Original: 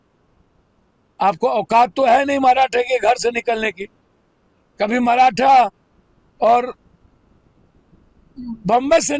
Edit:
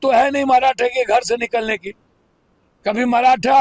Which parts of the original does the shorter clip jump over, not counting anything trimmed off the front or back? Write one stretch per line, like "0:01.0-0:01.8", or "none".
none